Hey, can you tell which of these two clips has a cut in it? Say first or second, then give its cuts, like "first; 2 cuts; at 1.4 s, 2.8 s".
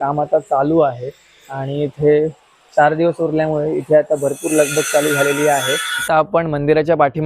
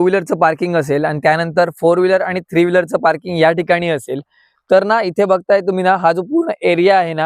first; 1 cut; at 5.9 s